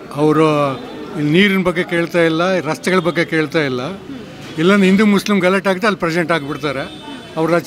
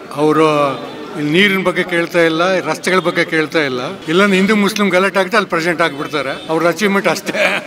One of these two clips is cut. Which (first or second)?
second